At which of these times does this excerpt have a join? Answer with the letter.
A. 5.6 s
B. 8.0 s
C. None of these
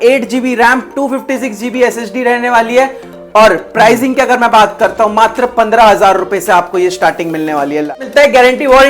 B